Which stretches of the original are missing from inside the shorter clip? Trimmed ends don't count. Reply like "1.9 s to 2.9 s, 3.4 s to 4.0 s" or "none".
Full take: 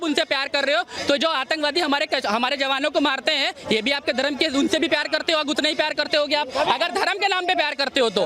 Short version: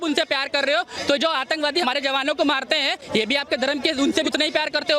1.8 s to 2.4 s, 4.8 s to 5.5 s